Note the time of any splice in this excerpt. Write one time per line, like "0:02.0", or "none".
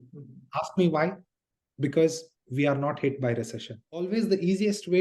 0:04.1